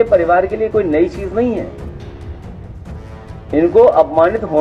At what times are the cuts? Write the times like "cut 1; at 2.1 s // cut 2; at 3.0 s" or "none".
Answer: none

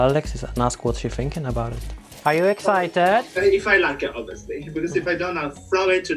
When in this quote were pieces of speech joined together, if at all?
cut 1; at 1.8 s // cut 2; at 3.3 s

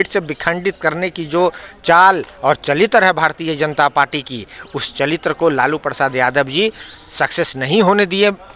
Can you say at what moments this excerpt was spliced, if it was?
none

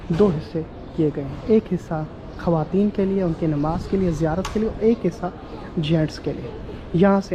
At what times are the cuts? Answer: none

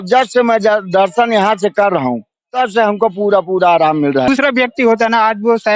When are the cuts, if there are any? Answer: cut 1; at 4.3 s

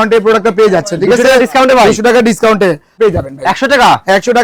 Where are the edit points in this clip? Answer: cut 1; at 2.9 s

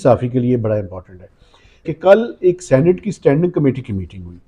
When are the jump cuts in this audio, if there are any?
cut 1; at 1.9 s

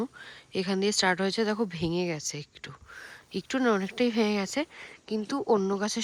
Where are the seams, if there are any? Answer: none

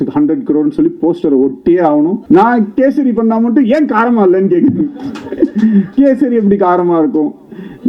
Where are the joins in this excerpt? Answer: cut 1; at 2.2 s

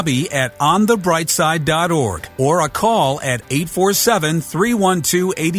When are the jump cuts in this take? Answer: cut 1; at 2.2 s

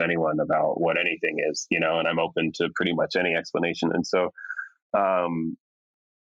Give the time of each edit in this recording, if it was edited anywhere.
none

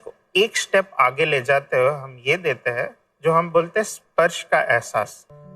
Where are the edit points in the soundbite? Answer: none

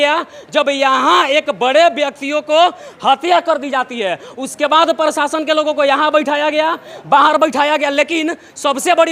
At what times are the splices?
none

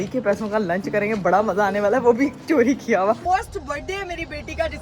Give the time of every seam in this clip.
cut 1; at 3.2 s

